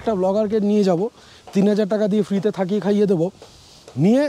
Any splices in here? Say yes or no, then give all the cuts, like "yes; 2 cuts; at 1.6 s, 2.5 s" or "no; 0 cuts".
no; 0 cuts